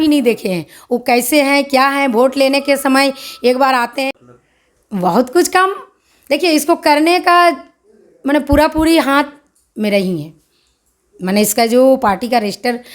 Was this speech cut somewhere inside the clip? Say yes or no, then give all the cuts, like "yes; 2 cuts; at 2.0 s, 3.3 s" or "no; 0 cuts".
yes; 1 cut; at 4.1 s